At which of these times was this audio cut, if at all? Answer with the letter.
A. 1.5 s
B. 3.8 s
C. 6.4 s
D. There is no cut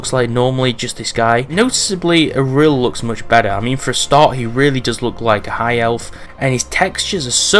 A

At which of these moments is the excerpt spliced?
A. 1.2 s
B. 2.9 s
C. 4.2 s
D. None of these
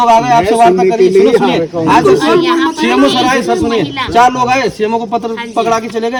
D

